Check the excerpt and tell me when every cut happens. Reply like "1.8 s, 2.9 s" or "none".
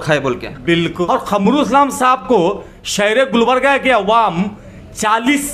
0.9 s